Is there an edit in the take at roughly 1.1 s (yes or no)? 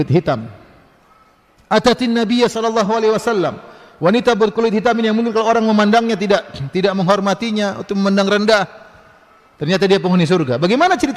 no